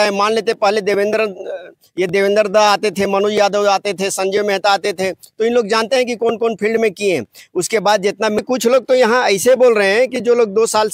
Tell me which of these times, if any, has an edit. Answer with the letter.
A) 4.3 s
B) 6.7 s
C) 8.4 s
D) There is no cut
C